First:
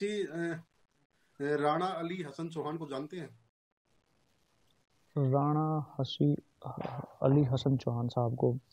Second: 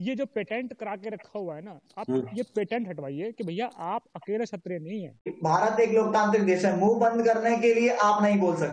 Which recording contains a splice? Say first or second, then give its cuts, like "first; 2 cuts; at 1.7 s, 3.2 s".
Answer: second; 1 cut; at 5.4 s